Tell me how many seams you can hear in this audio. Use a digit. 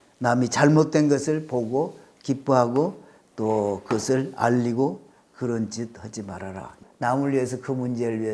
1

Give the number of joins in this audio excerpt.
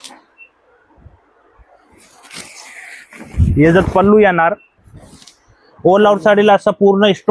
0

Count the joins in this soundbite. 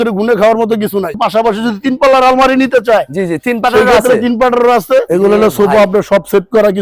2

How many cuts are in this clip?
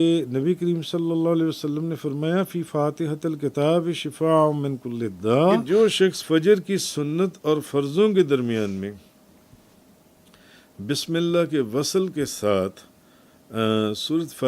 1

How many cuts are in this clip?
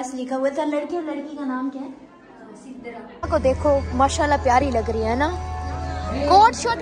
1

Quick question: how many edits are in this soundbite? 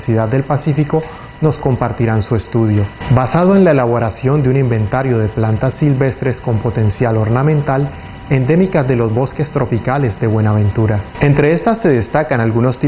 1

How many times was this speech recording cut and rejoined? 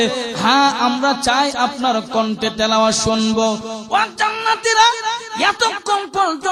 0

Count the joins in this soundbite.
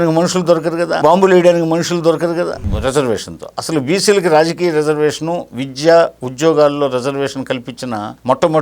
2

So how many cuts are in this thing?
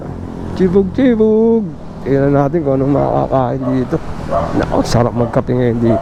0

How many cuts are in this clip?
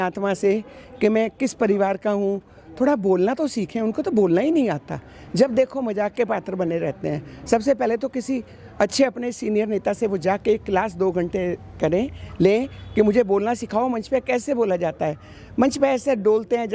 0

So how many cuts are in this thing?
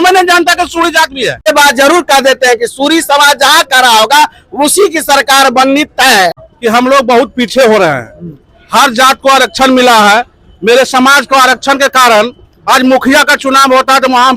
2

